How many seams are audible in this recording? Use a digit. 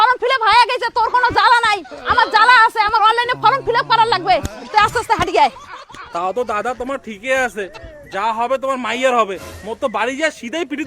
1